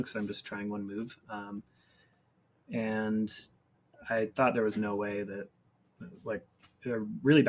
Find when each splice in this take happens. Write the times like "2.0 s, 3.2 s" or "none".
none